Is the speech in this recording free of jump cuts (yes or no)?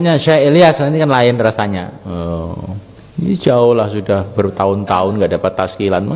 no